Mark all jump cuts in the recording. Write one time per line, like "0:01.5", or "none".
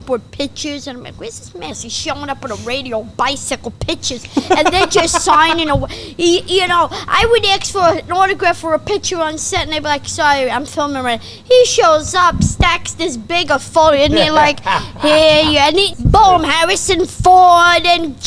0:01.9
0:16.0